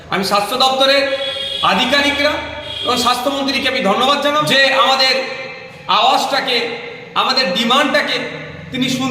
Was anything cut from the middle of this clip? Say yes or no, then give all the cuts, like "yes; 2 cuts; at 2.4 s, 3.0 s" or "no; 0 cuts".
yes; 1 cut; at 4.5 s